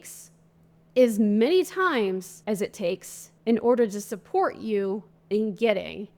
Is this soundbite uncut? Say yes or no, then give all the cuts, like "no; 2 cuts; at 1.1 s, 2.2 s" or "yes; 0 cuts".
no; 1 cut; at 2.7 s